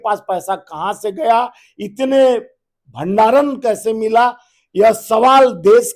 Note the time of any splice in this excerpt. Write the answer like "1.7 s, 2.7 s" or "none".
none